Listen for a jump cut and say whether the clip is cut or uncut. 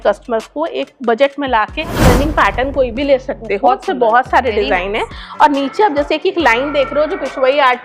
cut